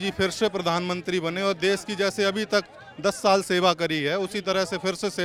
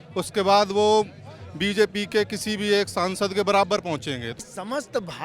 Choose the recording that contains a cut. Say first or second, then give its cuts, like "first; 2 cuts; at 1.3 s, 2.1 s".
second; 1 cut; at 4.3 s